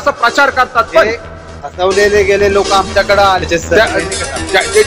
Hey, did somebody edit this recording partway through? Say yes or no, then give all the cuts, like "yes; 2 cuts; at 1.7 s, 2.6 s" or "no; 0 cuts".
yes; 1 cut; at 3.4 s